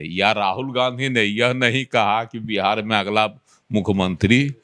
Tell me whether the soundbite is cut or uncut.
uncut